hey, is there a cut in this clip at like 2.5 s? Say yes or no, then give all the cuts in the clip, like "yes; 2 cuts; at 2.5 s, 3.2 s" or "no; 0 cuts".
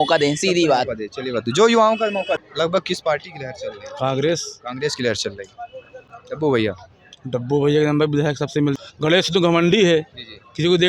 yes; 2 cuts; at 2.5 s, 8.8 s